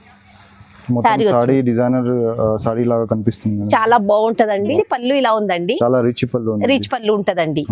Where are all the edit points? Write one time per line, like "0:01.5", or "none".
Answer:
0:04.7